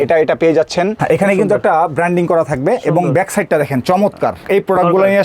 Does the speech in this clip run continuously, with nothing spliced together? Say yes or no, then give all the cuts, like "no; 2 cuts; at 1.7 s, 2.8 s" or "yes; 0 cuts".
no; 2 cuts; at 1.0 s, 4.4 s